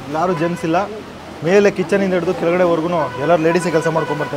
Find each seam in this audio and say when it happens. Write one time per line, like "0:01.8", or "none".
none